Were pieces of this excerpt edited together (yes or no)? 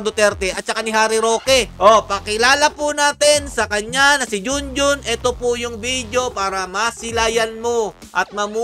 no